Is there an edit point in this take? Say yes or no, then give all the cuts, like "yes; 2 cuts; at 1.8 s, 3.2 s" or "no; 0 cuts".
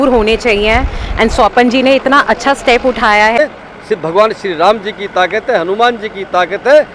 yes; 1 cut; at 3.4 s